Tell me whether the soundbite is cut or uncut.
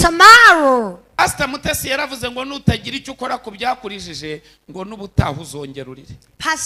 cut